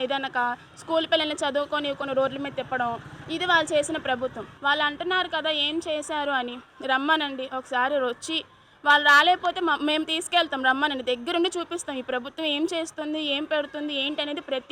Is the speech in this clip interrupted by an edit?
yes; 1 cut; at 4.5 s

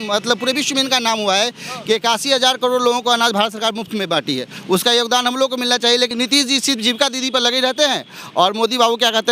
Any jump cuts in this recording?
yes; 1 cut; at 6.1 s

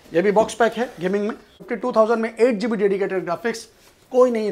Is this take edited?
yes; 1 cut; at 1.6 s

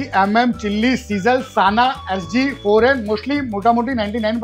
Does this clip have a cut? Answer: no; 0 cuts

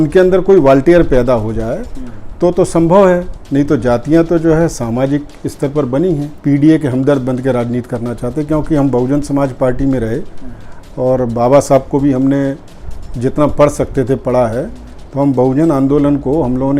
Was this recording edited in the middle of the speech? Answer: yes; 1 cut; at 6.3 s

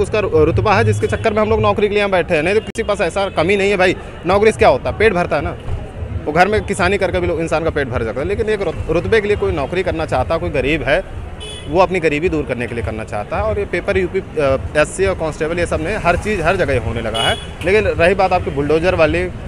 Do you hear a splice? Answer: no; 0 cuts

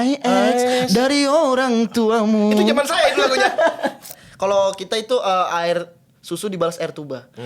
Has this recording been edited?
yes; 1 cut; at 4.1 s

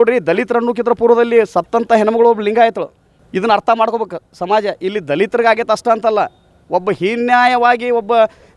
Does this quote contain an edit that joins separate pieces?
no; 0 cuts

